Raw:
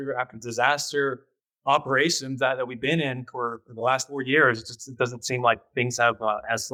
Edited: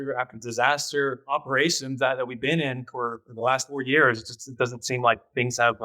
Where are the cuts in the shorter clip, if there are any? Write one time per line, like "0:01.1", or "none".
0:01.2